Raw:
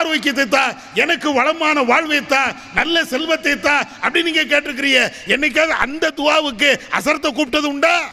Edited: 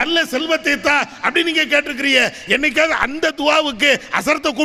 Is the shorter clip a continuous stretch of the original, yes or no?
yes